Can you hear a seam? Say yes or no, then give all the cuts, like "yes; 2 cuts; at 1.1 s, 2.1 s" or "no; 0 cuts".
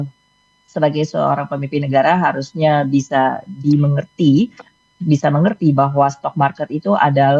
no; 0 cuts